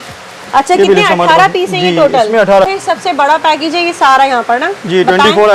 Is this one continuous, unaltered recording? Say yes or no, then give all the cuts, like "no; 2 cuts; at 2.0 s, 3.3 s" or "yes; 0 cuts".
no; 1 cut; at 2.7 s